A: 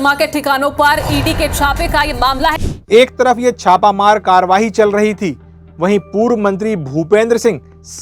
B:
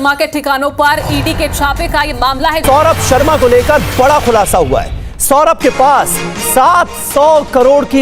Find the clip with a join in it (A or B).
B